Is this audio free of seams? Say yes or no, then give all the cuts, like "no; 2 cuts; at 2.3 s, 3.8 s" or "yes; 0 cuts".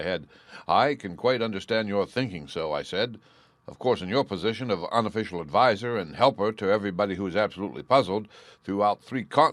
no; 1 cut; at 2.2 s